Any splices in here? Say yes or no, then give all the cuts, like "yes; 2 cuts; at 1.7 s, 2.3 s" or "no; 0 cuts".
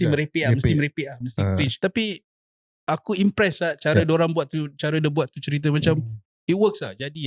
yes; 1 cut; at 1.7 s